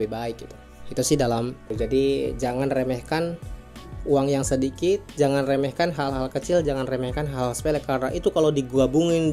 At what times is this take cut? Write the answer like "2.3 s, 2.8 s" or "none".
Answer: 1.6 s